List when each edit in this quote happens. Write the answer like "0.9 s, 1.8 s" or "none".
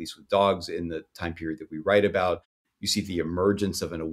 2.7 s